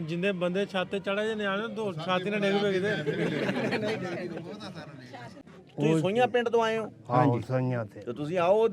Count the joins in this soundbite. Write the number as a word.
one